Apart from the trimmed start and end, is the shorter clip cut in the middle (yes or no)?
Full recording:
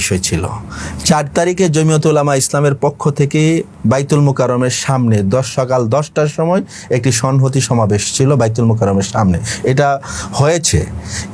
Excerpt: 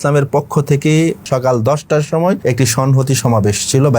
yes